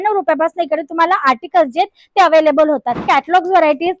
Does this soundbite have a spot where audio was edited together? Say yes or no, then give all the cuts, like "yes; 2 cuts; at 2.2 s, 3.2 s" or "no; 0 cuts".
yes; 1 cut; at 3.0 s